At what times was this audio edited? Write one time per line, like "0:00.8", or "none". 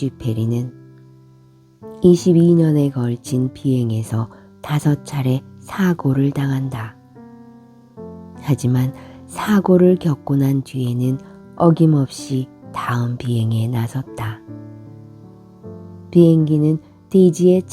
0:14.5
0:16.1